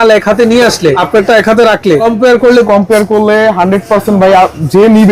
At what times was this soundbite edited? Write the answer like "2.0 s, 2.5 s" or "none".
1.0 s, 2.0 s